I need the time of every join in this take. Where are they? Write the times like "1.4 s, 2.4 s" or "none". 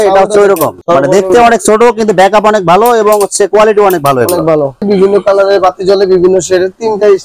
4.8 s